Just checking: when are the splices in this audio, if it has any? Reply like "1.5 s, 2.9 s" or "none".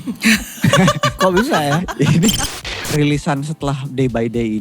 2.3 s